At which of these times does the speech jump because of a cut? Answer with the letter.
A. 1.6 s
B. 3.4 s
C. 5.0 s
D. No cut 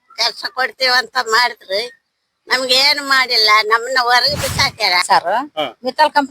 C